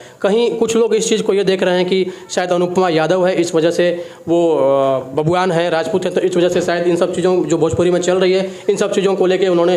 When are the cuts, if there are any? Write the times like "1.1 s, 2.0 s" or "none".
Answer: none